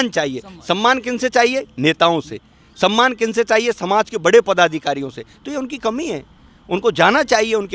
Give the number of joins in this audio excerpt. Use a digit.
0